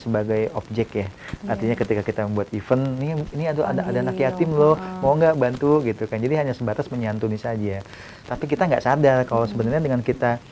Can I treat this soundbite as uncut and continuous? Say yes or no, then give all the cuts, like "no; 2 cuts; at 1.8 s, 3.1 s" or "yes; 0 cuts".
yes; 0 cuts